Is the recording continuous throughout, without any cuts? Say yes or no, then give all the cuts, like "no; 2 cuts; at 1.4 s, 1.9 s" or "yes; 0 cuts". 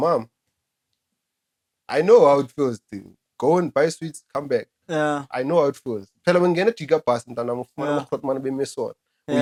yes; 0 cuts